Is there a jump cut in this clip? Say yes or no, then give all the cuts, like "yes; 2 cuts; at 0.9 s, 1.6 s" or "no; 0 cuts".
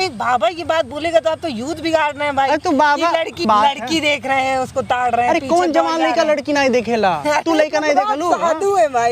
yes; 1 cut; at 3.5 s